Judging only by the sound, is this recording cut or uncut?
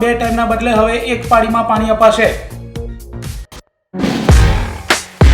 cut